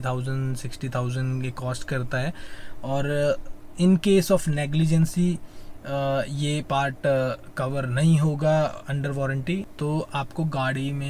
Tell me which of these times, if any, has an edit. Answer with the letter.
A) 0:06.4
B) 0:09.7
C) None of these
B